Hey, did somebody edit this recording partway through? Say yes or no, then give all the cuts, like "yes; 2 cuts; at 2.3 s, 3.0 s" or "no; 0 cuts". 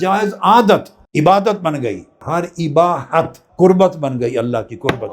yes; 3 cuts; at 1.0 s, 2.1 s, 3.4 s